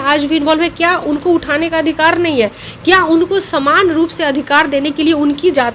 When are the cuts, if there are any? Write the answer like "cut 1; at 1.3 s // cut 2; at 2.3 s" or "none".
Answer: none